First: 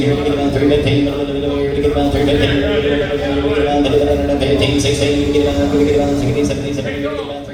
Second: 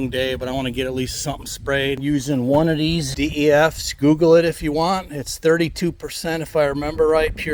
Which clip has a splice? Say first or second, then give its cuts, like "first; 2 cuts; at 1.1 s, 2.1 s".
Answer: second; 2 cuts; at 2.0 s, 3.1 s